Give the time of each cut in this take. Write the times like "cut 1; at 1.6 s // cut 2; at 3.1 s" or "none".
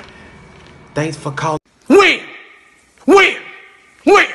cut 1; at 1.7 s